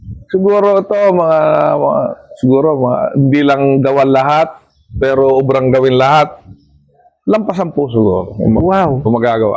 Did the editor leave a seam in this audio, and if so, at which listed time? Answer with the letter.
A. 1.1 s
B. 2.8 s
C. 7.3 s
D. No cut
D